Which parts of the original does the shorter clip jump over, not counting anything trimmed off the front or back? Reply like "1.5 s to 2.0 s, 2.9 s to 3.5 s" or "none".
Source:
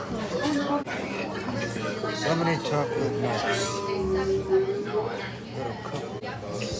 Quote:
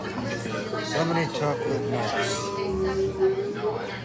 none